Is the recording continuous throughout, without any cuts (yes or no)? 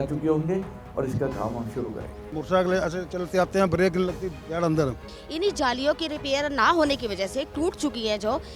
no